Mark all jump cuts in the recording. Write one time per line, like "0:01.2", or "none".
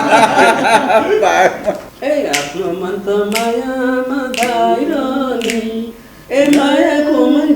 0:01.9